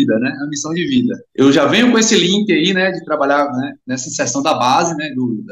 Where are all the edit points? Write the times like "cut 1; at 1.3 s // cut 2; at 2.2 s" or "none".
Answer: cut 1; at 1.2 s